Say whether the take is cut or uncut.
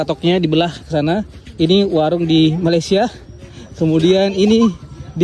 uncut